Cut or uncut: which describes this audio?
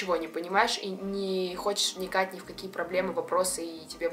uncut